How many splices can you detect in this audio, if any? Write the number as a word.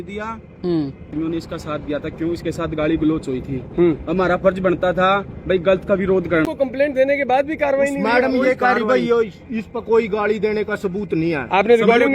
two